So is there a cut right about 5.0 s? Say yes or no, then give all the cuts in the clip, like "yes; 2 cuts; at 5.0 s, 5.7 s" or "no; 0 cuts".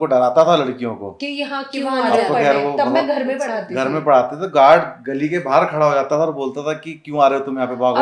no; 0 cuts